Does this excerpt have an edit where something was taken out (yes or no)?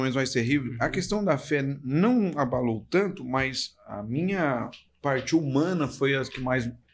no